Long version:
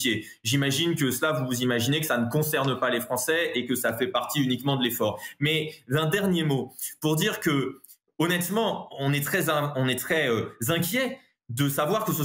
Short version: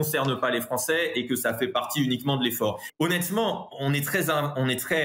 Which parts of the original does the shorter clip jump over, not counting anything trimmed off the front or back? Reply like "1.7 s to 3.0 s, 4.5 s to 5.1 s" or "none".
5.2 s to 8.0 s